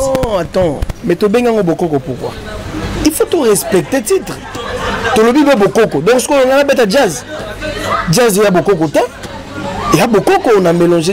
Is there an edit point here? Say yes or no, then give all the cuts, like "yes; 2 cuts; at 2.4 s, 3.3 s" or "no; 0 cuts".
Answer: no; 0 cuts